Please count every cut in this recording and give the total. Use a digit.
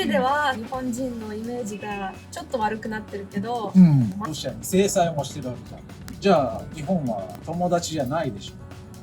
1